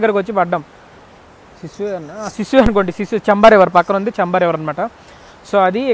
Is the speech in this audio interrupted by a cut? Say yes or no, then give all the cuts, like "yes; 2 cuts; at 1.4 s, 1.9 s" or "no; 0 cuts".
no; 0 cuts